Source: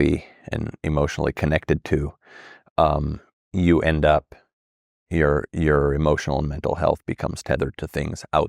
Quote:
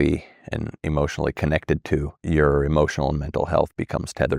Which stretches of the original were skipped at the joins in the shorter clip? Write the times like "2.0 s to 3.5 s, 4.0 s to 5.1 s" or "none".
2.2 s to 5.5 s